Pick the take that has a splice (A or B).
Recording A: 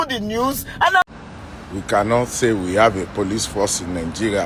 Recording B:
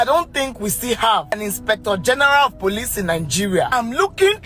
A